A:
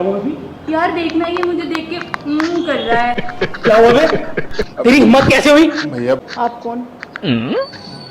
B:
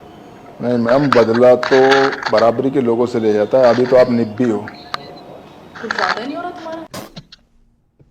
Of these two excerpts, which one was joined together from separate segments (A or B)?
A